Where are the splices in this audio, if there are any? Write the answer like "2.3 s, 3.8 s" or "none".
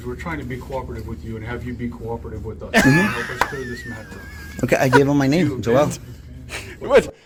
none